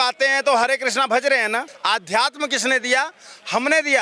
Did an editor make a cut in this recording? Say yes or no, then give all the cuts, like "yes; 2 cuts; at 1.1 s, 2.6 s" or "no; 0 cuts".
yes; 1 cut; at 1.7 s